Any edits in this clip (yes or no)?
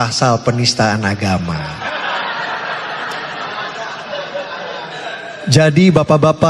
no